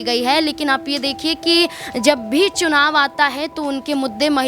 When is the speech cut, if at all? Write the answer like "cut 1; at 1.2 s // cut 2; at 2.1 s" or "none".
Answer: none